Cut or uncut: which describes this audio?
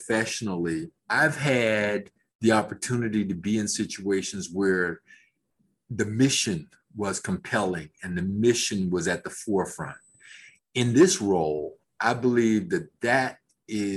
cut